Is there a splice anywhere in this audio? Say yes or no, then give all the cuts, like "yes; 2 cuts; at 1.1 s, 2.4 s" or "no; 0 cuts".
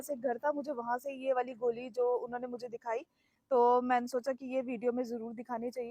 no; 0 cuts